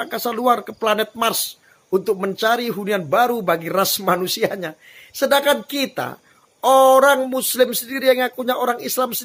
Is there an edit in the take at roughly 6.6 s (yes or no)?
no